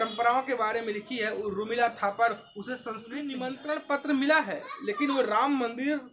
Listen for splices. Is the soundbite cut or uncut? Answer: cut